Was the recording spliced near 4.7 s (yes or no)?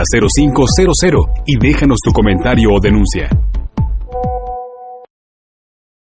yes